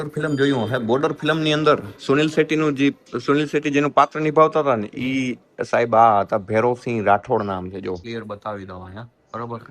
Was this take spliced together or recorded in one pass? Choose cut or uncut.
uncut